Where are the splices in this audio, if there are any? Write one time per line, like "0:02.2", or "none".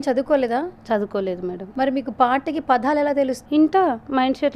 0:01.6
0:03.4